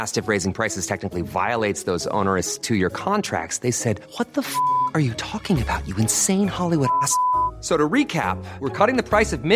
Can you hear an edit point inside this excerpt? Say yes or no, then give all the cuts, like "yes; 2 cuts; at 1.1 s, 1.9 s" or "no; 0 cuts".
no; 0 cuts